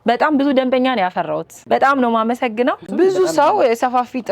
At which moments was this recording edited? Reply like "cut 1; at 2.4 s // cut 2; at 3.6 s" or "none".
cut 1; at 1.5 s // cut 2; at 2.9 s